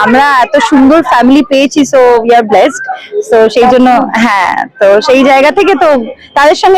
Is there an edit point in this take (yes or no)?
no